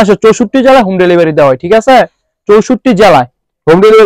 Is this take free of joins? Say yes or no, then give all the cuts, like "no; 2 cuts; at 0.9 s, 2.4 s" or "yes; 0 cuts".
yes; 0 cuts